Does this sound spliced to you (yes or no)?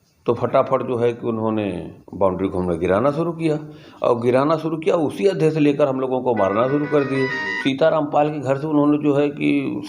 yes